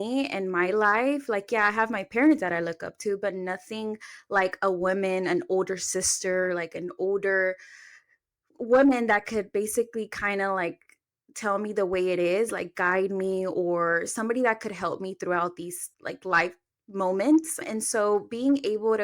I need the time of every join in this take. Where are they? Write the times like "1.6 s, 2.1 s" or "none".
15.8 s